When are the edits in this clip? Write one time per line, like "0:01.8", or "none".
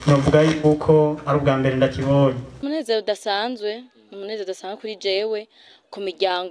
0:02.6